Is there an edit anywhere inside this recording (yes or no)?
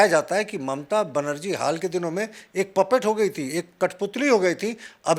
no